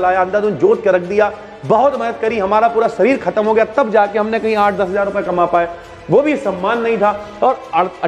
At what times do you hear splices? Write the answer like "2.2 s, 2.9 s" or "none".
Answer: none